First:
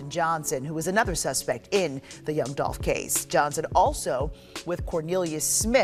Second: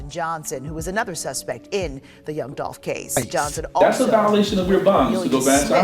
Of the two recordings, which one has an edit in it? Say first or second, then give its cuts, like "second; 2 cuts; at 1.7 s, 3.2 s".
second; 1 cut; at 3.8 s